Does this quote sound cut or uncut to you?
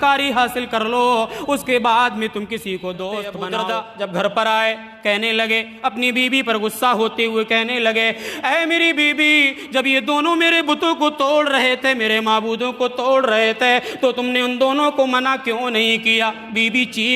cut